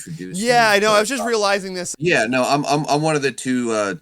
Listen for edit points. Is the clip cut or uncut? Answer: cut